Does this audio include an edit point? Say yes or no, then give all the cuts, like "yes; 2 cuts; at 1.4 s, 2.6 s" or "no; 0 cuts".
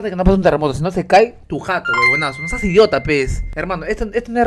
yes; 2 cuts; at 1.4 s, 3.5 s